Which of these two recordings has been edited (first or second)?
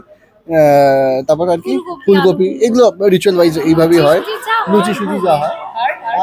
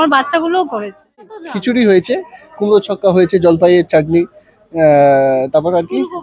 second